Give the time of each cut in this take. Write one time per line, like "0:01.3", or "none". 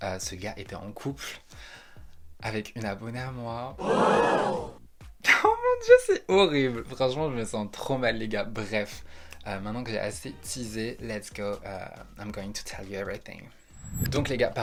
none